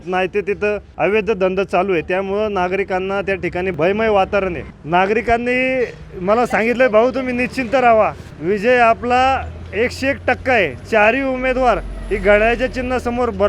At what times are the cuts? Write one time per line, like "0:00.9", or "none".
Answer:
0:00.9
0:03.7
0:04.7
0:08.3